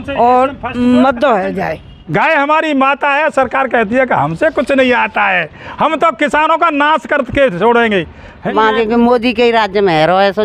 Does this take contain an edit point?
yes; 2 cuts; at 1.9 s, 8.5 s

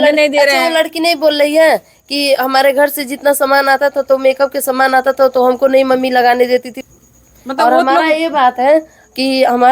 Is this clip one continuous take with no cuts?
no; 1 cut; at 6.7 s

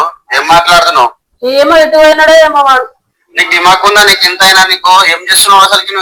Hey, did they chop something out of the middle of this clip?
no; 0 cuts

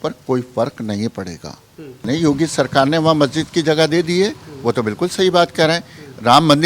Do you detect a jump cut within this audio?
yes; 1 cut; at 2.0 s

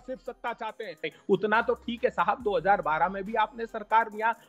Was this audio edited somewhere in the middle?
yes; 1 cut; at 1.1 s

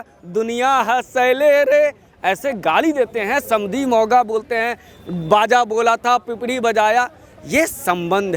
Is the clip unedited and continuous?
yes; 0 cuts

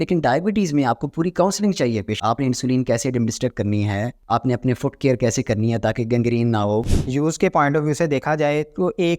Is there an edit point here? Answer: yes; 2 cuts; at 4.2 s, 6.9 s

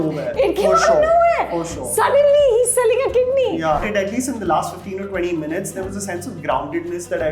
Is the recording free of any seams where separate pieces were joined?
no; 1 cut; at 3.8 s

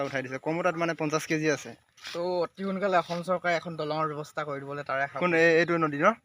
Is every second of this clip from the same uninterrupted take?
yes; 0 cuts

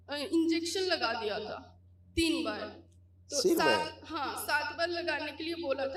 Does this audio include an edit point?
no; 0 cuts

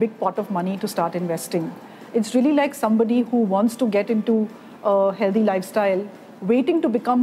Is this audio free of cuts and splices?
yes; 0 cuts

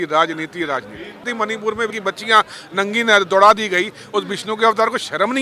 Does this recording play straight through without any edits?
no; 1 cut; at 1.2 s

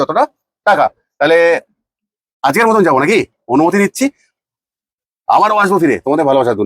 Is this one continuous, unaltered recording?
yes; 0 cuts

